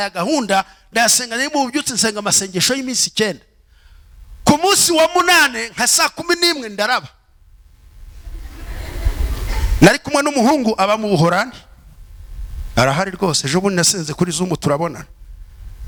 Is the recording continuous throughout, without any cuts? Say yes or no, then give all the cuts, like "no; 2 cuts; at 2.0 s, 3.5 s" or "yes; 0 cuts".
yes; 0 cuts